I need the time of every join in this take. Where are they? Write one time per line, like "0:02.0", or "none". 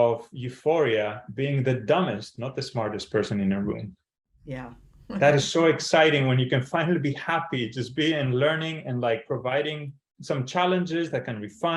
none

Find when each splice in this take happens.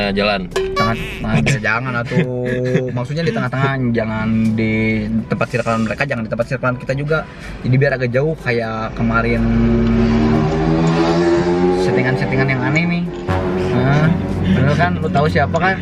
none

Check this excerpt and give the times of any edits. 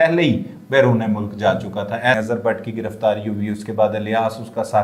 0:02.2

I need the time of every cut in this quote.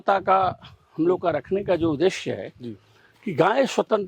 none

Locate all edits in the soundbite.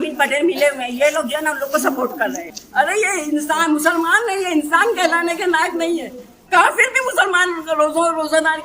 0:02.5

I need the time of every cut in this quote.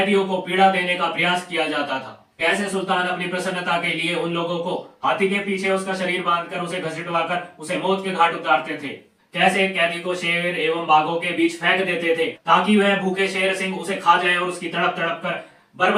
none

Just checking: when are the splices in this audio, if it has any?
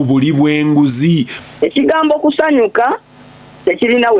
0:01.4

